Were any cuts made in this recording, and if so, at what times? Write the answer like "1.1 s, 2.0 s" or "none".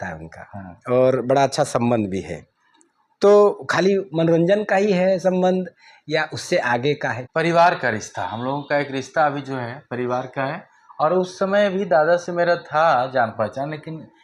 7.2 s